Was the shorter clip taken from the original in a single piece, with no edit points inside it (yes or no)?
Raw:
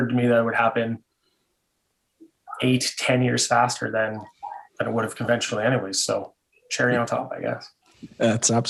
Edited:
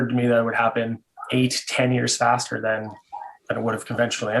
no